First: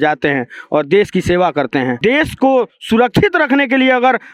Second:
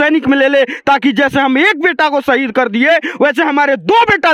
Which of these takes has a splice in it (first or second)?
first